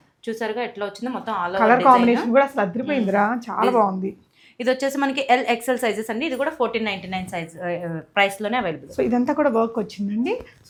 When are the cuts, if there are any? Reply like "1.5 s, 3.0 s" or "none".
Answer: none

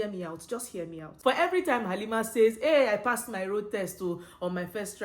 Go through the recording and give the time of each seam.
1.1 s

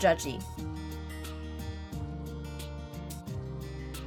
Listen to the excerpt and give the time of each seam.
none

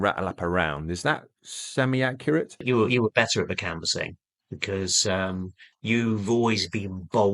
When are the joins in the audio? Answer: 2.6 s

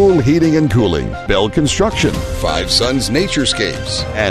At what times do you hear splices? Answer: 1.2 s

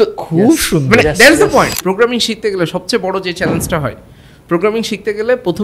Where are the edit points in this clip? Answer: 1.8 s

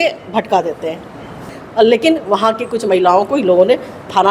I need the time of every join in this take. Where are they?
1.4 s

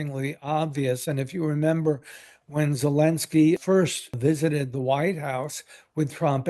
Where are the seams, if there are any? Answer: 3.7 s

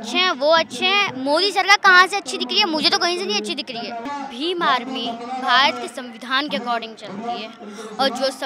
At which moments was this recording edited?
4.0 s

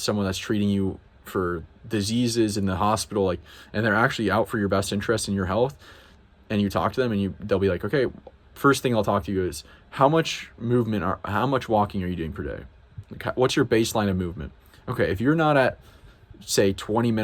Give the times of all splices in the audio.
none

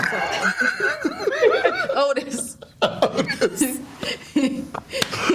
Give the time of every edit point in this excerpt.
none

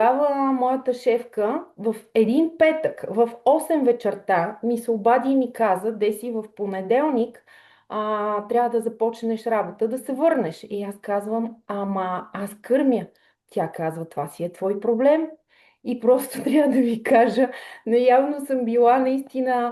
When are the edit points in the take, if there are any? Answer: none

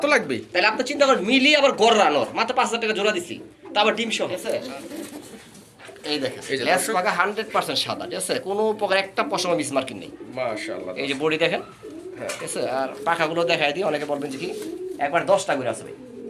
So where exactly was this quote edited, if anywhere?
4.4 s

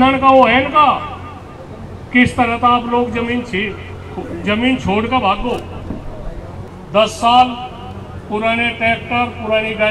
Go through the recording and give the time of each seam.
6.7 s

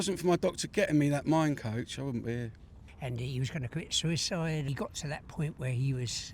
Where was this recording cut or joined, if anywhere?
2.9 s, 4.7 s

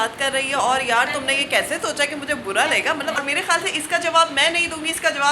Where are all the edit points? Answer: 3.2 s

